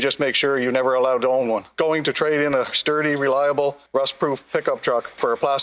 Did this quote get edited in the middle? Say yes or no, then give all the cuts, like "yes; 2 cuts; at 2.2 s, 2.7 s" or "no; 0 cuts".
yes; 1 cut; at 1.7 s